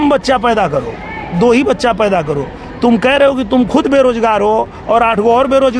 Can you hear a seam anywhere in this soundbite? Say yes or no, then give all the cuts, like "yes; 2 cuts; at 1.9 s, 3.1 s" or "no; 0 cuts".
no; 0 cuts